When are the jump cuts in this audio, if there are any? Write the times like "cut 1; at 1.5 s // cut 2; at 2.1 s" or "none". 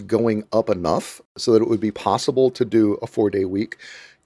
cut 1; at 1.4 s